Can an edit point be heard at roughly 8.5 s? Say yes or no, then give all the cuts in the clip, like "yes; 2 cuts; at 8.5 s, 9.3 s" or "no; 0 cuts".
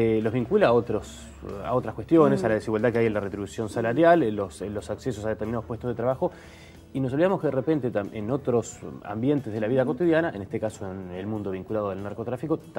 no; 0 cuts